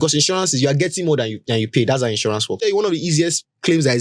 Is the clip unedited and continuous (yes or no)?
no